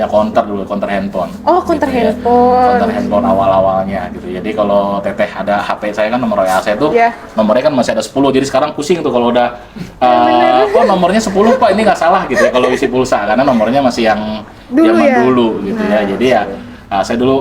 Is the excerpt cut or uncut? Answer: uncut